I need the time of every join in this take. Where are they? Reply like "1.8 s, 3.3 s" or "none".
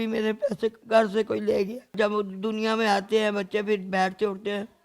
0.8 s, 1.9 s